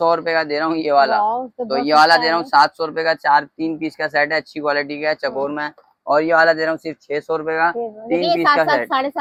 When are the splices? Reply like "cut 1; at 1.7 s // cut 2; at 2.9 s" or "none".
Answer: none